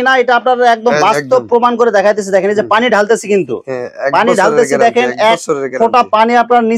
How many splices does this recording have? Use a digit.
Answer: 0